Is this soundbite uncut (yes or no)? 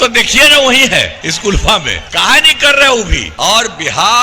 no